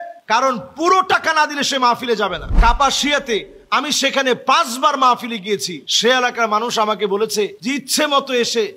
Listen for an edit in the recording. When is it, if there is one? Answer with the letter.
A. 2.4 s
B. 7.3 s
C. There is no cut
A